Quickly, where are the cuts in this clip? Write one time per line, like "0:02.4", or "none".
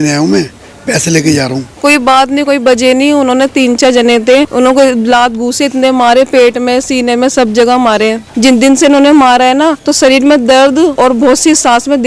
0:01.7
0:04.5
0:08.2
0:09.8
0:10.9